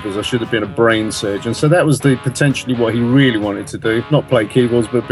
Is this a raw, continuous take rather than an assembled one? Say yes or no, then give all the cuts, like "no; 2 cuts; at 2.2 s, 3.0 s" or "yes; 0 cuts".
no; 1 cut; at 4.0 s